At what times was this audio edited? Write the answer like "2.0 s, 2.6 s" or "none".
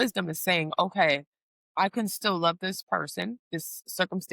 3.4 s